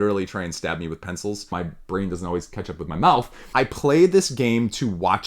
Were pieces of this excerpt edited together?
yes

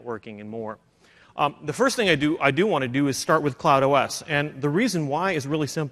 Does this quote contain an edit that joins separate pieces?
yes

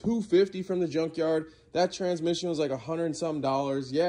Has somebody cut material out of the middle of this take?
no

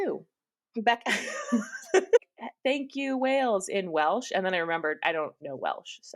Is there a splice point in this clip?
yes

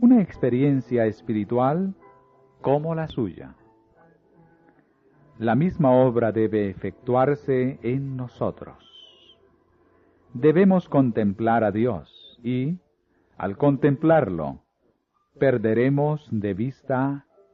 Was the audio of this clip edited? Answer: no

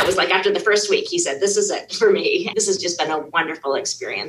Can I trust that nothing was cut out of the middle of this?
no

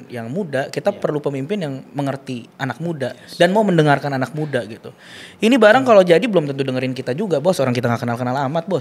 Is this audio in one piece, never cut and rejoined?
yes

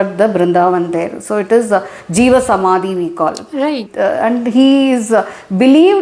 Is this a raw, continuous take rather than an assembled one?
yes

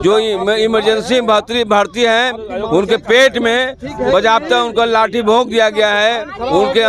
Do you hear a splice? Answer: no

